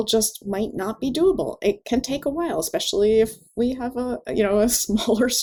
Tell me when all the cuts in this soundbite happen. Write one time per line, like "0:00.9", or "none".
none